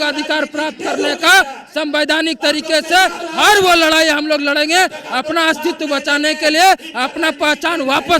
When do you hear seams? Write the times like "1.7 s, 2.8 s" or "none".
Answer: none